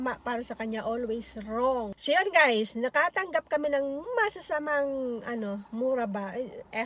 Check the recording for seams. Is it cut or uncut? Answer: cut